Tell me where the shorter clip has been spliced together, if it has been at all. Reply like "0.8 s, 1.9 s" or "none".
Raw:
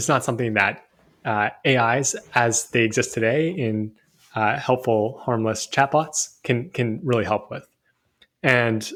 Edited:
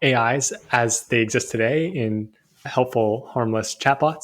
2.7 s